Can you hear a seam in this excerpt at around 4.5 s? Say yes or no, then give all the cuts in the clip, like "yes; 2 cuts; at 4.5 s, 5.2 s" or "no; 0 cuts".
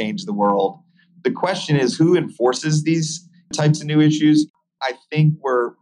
yes; 1 cut; at 4.5 s